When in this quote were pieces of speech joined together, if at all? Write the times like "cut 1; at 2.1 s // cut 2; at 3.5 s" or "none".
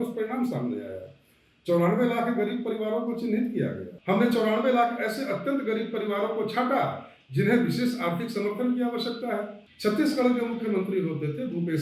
cut 1; at 3.9 s // cut 2; at 9.6 s